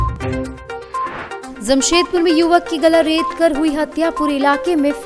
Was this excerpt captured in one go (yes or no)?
no